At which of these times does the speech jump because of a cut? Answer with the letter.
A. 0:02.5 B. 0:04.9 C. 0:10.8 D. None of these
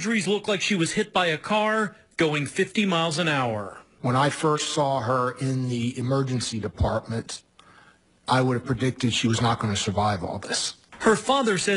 B